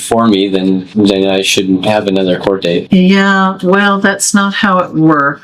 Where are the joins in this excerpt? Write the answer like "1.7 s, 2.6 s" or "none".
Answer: none